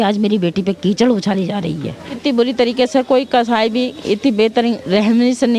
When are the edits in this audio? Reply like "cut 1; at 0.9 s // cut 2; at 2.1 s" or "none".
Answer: cut 1; at 2.2 s